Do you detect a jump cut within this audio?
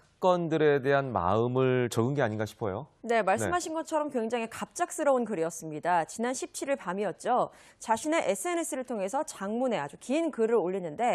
yes; 1 cut; at 4.5 s

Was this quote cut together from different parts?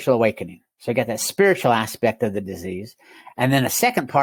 no; 0 cuts

